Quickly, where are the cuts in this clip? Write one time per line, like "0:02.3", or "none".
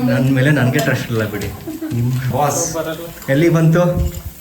0:02.3

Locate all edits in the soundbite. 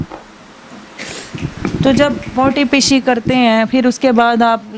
none

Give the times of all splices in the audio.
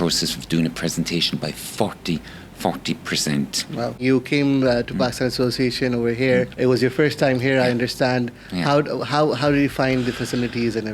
0:04.0
0:06.5

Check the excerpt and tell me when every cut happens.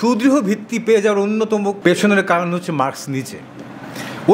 0:01.8

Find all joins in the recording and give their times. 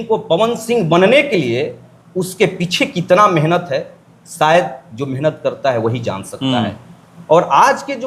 none

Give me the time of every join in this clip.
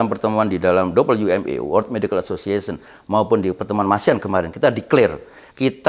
none

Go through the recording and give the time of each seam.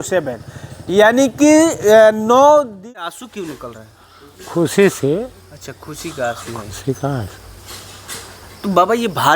0:03.0

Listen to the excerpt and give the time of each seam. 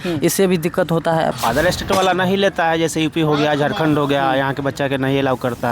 0:01.3

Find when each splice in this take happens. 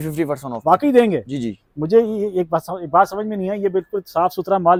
none

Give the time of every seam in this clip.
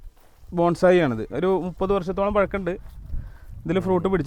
none

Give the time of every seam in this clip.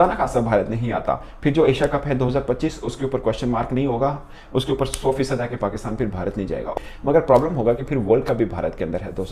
none

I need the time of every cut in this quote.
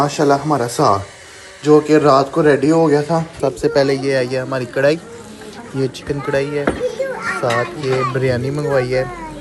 0:03.3

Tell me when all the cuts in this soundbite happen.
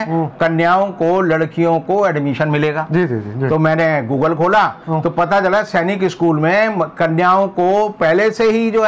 none

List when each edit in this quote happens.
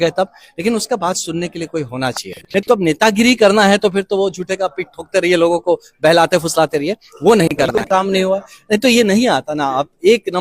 0:02.7
0:07.9

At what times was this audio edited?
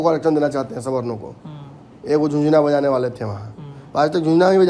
none

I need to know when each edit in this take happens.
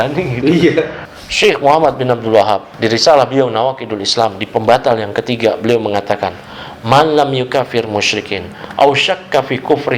0:01.0
0:02.7

